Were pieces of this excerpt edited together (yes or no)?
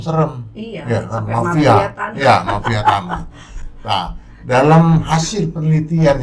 no